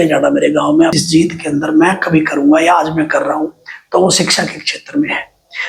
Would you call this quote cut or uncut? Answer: cut